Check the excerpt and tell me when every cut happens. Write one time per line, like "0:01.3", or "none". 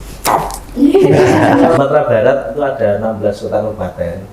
0:01.8